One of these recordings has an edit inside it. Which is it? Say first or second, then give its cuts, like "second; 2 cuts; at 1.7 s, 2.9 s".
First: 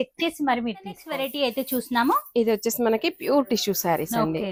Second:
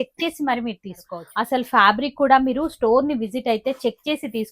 second; 1 cut; at 1.1 s